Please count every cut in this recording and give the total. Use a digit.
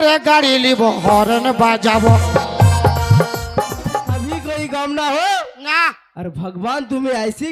1